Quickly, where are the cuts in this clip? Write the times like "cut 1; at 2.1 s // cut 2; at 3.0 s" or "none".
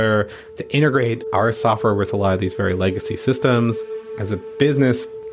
cut 1; at 4.1 s

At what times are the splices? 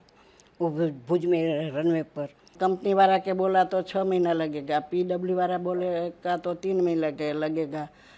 cut 1; at 2.4 s

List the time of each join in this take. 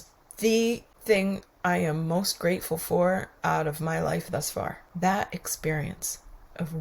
cut 1; at 0.9 s // cut 2; at 4.8 s

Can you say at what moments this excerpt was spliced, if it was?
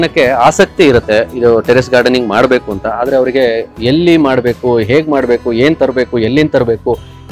none

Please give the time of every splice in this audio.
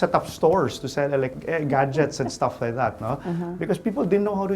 cut 1; at 1.4 s

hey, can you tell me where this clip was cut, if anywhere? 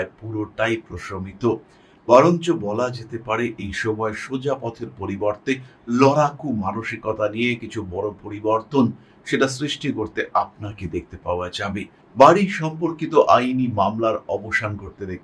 cut 1; at 12.0 s

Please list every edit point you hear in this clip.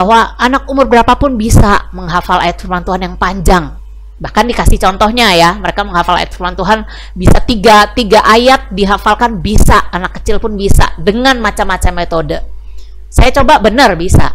none

